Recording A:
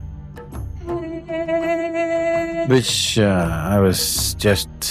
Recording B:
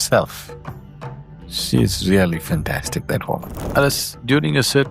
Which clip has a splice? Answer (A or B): B